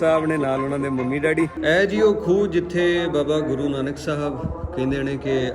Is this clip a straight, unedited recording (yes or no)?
no